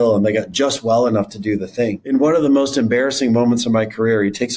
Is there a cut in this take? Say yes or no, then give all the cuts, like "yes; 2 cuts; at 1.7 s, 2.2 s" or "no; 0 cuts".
yes; 1 cut; at 2.0 s